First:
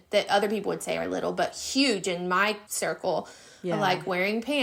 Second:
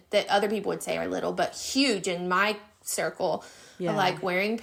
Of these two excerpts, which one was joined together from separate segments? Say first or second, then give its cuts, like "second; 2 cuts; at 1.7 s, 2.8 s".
first; 1 cut; at 2.7 s